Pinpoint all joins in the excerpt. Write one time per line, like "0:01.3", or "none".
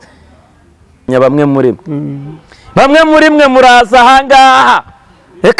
0:01.1